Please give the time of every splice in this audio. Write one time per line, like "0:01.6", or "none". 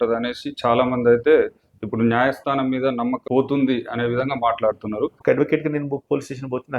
0:03.2
0:05.2